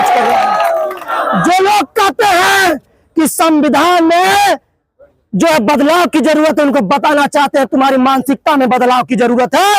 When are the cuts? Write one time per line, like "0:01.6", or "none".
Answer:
0:01.1